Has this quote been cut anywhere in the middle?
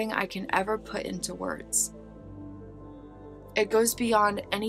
no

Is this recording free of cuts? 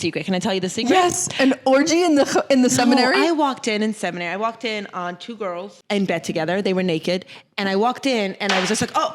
no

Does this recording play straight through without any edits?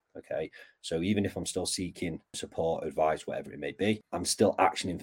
no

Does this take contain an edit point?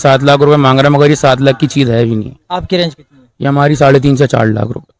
no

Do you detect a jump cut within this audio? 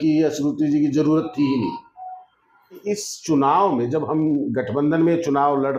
yes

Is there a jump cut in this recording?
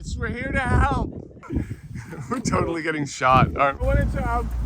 yes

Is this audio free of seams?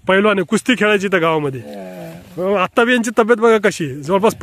yes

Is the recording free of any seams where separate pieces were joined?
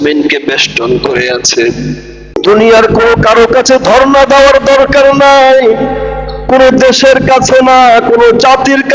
no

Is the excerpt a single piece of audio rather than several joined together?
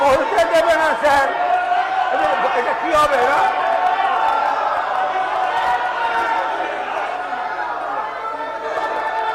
yes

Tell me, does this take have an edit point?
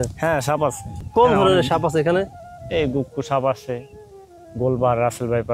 yes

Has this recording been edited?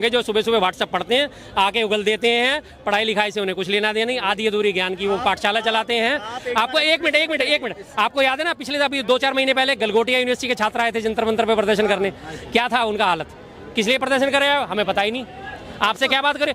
no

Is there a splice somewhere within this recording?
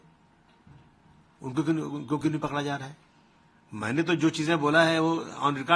no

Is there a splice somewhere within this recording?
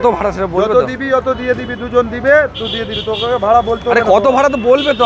no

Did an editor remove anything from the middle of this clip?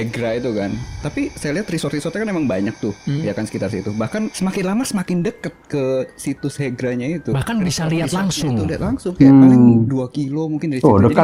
no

